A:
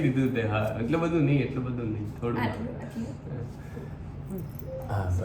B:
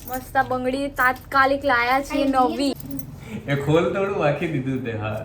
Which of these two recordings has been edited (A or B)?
B